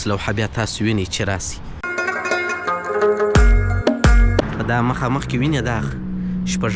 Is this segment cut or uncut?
cut